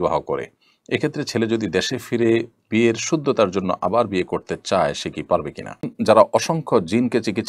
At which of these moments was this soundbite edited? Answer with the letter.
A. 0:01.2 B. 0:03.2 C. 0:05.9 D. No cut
C